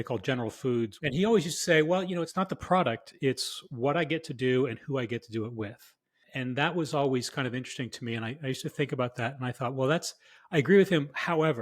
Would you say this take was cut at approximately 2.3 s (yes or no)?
yes